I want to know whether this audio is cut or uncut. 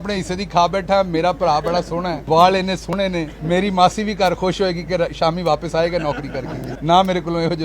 cut